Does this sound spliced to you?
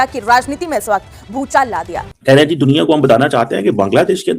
yes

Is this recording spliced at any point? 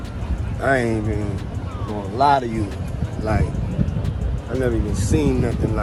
no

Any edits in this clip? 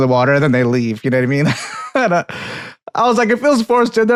no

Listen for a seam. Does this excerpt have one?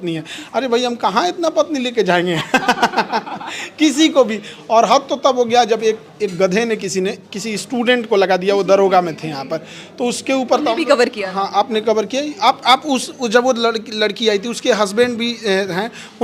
no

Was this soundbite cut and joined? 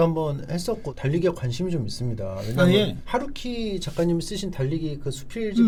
no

